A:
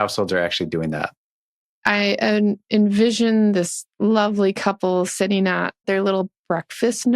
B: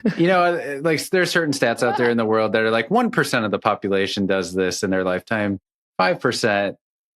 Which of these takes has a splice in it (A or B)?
A